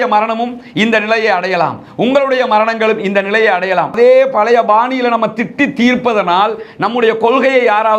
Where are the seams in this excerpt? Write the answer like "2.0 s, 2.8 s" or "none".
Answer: 3.9 s